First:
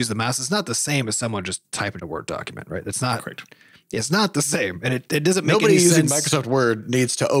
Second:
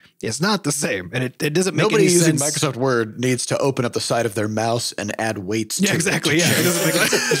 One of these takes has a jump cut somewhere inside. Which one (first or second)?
first